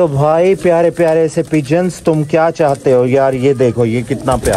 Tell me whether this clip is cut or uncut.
uncut